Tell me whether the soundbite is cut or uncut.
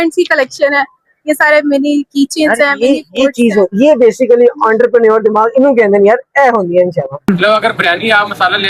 cut